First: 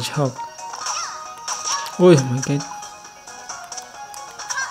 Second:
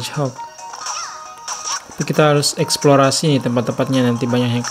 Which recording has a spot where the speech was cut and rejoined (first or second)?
second